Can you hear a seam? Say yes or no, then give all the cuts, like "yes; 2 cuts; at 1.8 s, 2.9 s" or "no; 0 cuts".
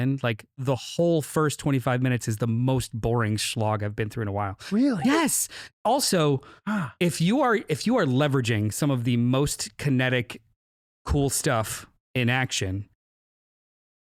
no; 0 cuts